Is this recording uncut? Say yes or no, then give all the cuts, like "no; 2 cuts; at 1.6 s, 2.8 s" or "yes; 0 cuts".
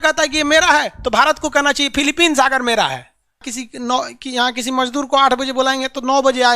no; 1 cut; at 3.5 s